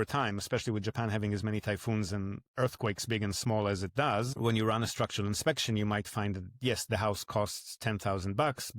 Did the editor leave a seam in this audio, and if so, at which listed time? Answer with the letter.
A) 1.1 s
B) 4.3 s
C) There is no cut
B